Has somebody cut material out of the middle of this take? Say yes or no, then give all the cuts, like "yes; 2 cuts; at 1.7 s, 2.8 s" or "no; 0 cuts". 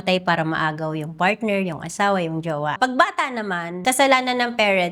yes; 2 cuts; at 2.7 s, 3.7 s